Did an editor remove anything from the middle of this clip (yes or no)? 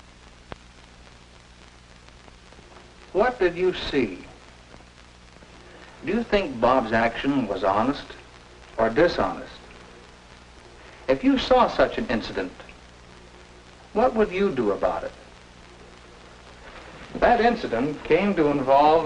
yes